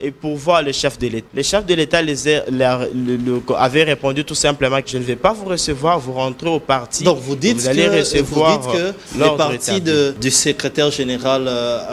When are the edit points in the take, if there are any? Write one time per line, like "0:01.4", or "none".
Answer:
0:01.2
0:04.9
0:10.2